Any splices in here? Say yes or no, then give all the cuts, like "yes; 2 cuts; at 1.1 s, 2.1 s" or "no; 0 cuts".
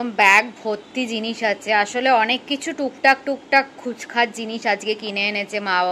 no; 0 cuts